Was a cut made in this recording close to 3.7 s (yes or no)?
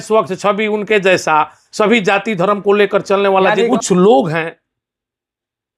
yes